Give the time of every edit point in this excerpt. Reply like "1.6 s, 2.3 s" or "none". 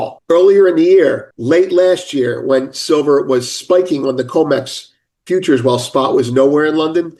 none